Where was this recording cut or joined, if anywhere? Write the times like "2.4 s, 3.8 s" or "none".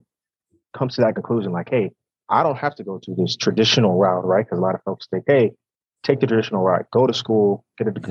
none